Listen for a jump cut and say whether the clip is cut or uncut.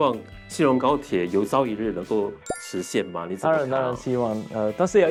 uncut